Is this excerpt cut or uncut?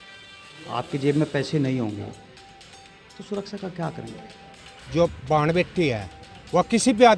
cut